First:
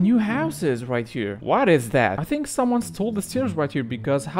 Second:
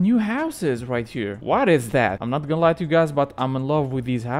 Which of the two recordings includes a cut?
first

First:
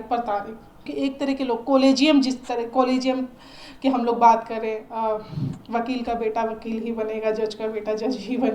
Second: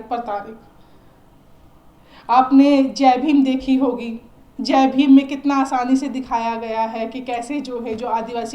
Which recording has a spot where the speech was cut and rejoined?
first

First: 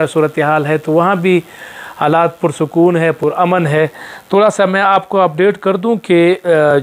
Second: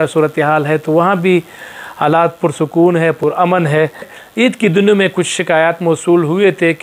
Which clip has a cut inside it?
second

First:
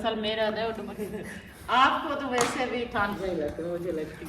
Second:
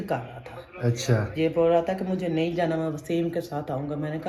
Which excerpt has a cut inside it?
first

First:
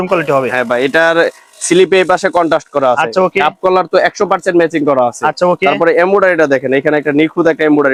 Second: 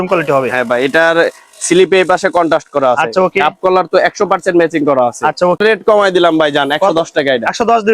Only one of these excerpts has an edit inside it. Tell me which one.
second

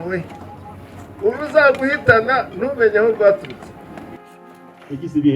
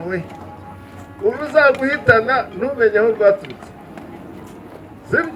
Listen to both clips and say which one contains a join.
first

